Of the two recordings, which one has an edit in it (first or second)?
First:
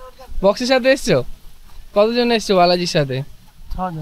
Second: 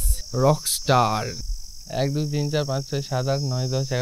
second